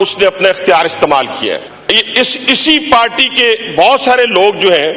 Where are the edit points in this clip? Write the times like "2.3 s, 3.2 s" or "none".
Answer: 1.7 s